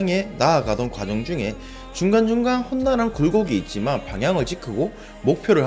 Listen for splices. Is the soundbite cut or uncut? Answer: uncut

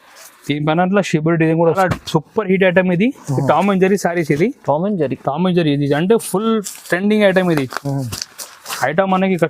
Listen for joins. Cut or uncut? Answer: cut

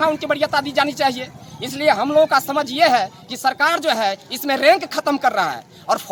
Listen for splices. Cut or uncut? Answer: uncut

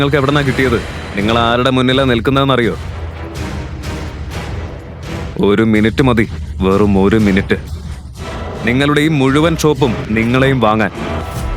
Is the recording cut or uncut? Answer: uncut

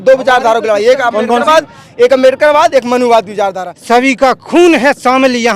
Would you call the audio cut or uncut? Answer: cut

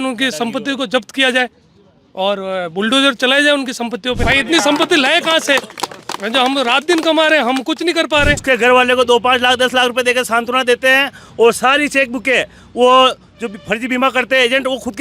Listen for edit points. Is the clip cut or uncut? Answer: cut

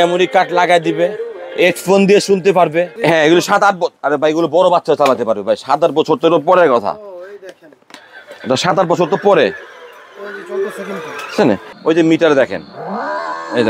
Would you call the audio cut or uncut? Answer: cut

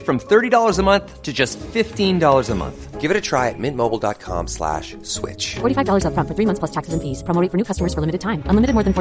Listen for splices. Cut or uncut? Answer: uncut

